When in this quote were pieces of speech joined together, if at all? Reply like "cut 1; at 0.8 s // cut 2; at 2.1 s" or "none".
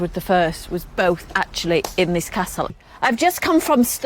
cut 1; at 2.7 s